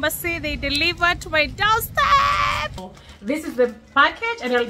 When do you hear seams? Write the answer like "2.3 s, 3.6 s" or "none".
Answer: 2.9 s